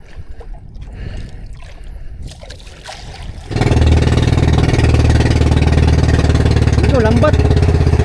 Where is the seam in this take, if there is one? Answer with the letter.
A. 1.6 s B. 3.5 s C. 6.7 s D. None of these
B